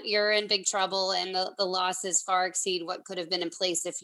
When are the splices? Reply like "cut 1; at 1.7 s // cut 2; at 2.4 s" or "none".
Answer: none